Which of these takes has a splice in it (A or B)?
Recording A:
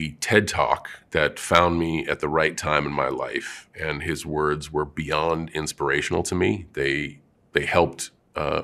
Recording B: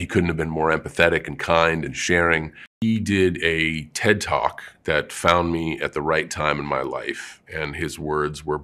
B